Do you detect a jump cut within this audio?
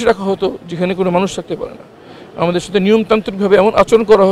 no; 0 cuts

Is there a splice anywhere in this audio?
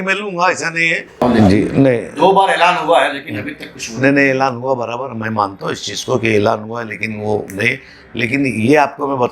yes; 1 cut; at 1.1 s

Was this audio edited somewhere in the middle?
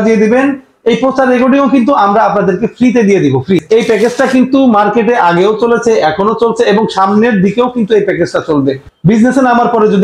yes; 2 cuts; at 3.6 s, 8.9 s

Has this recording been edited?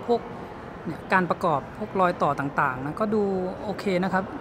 no; 0 cuts

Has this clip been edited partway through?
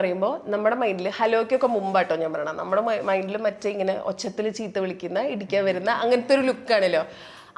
no; 0 cuts

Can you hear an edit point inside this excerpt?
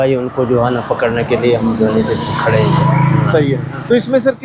no; 0 cuts

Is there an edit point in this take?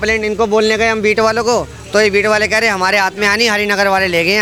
no; 0 cuts

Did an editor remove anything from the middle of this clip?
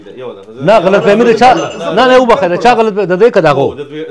no; 0 cuts

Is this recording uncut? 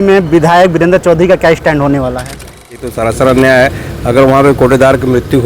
no; 1 cut; at 2.8 s

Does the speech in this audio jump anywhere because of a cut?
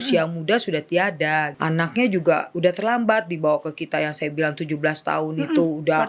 yes; 2 cuts; at 1.5 s, 2.5 s

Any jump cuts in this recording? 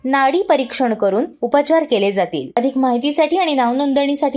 yes; 1 cut; at 2.5 s

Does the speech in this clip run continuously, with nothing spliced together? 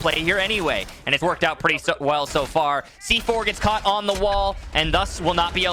yes; 0 cuts

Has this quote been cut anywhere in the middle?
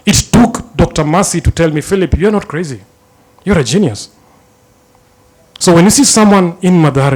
no; 0 cuts

